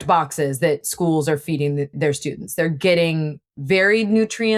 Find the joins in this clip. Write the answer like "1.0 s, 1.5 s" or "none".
none